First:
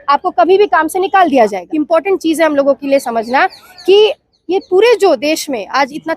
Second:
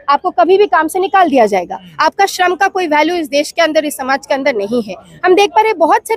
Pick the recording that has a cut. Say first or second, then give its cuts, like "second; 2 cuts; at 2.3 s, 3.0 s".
first; 1 cut; at 1.6 s